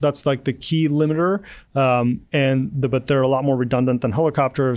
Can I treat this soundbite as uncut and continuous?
yes; 0 cuts

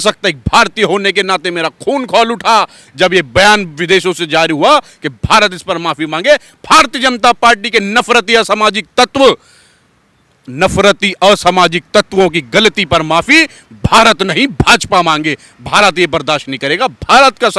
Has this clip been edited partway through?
no; 0 cuts

